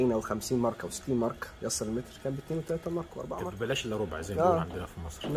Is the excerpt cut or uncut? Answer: cut